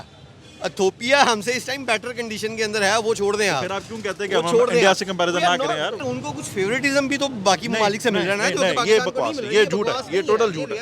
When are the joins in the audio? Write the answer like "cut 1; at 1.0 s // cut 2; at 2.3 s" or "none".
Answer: cut 1; at 6.0 s